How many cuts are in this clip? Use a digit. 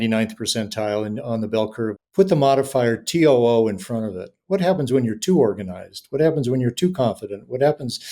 1